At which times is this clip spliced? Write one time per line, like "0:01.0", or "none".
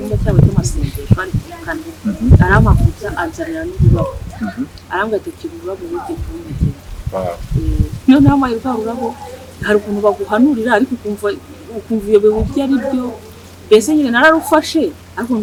none